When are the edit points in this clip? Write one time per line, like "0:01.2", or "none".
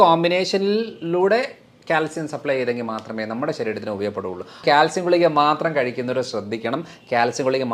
0:04.6